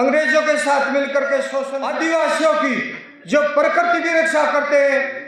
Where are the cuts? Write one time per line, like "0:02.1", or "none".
0:01.6